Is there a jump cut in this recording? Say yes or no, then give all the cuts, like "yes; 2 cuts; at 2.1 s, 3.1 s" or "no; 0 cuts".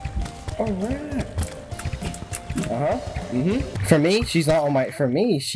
yes; 1 cut; at 3.7 s